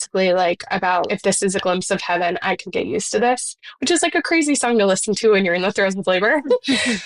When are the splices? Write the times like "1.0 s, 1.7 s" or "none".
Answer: 1.1 s